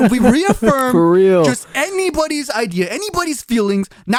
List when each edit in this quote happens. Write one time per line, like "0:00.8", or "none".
none